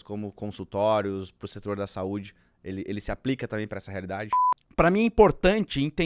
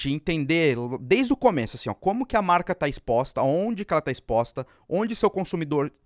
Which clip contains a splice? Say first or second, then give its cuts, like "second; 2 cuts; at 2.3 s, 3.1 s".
first; 1 cut; at 4.4 s